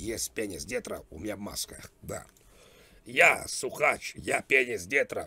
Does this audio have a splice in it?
no; 0 cuts

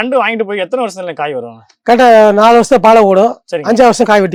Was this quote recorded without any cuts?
yes; 0 cuts

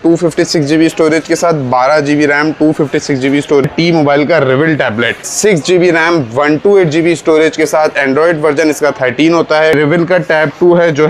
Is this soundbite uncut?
no; 3 cuts; at 3.7 s, 5.3 s, 9.7 s

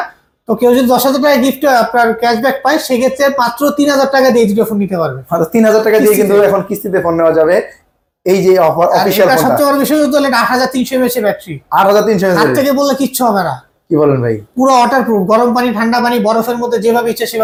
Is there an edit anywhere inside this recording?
no; 0 cuts

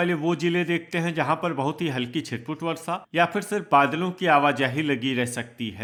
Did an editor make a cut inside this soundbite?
no; 0 cuts

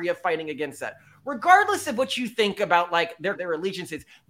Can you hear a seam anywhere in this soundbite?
yes; 1 cut; at 3.4 s

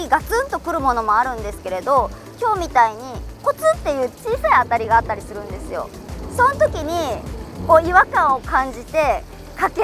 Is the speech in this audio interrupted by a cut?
no; 0 cuts

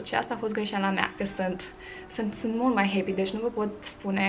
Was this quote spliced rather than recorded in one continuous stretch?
yes; 1 cut; at 1.1 s

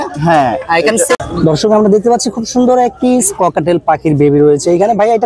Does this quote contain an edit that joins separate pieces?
yes; 1 cut; at 1.2 s

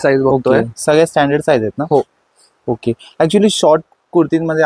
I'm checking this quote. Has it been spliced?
no; 0 cuts

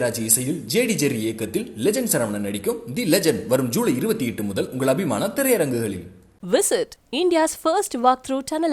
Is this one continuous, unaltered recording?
yes; 0 cuts

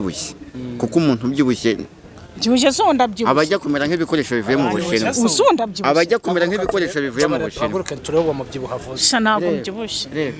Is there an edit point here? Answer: no; 0 cuts

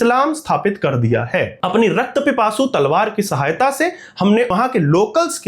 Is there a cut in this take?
yes; 1 cut; at 4.5 s

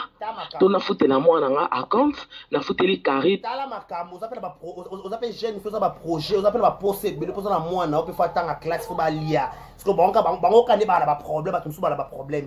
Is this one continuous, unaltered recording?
yes; 0 cuts

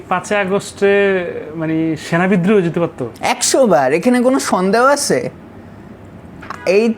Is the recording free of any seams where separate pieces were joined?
yes; 0 cuts

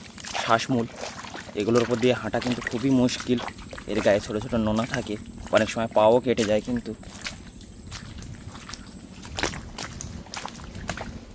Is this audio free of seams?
yes; 0 cuts

